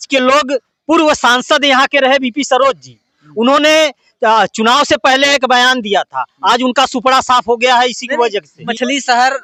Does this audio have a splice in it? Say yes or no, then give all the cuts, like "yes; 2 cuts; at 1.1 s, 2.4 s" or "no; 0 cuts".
no; 0 cuts